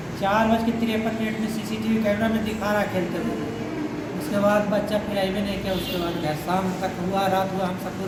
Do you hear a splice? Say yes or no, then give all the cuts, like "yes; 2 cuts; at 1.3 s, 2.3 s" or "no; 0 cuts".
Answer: no; 0 cuts